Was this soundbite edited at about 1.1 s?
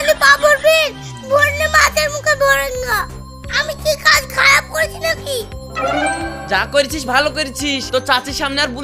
no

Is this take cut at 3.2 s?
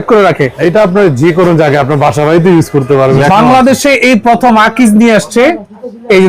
yes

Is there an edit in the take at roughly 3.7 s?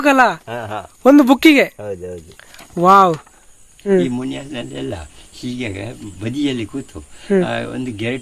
yes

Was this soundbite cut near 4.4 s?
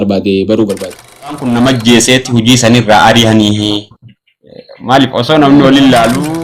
no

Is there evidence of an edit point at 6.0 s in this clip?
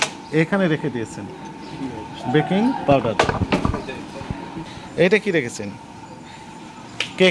no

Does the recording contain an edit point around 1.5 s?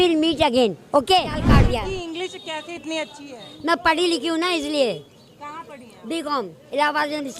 yes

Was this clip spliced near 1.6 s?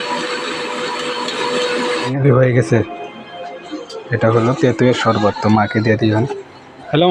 yes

